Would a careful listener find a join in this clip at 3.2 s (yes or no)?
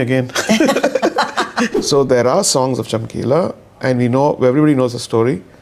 no